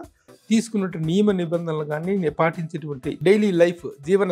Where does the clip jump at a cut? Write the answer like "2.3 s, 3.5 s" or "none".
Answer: 3.2 s